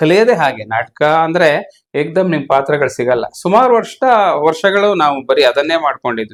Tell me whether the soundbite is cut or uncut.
uncut